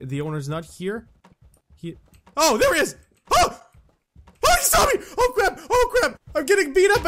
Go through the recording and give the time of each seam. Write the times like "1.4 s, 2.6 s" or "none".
6.2 s